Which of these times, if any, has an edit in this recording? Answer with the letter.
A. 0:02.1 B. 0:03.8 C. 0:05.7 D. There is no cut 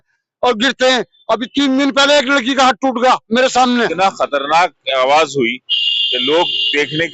B